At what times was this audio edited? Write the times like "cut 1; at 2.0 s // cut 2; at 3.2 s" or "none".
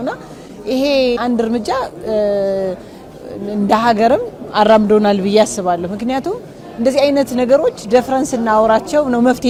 none